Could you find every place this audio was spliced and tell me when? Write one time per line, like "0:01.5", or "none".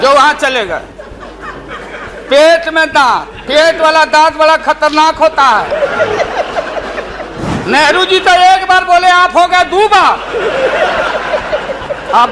0:07.5